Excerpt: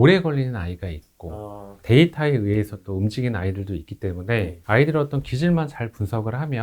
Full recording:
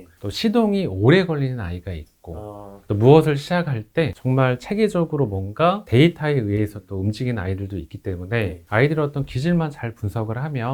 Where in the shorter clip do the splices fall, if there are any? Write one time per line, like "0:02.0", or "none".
0:01.8